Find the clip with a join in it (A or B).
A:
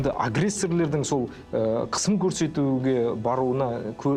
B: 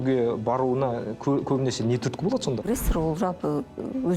B